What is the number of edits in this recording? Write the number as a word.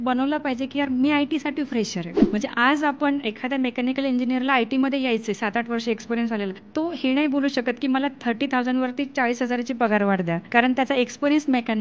three